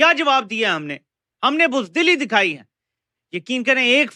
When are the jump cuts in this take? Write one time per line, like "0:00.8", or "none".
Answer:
none